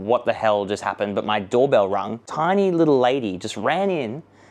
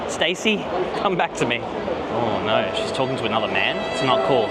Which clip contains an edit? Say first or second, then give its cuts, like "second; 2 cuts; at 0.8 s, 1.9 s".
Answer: first; 1 cut; at 2.1 s